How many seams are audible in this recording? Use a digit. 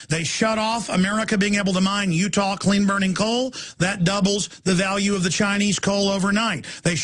1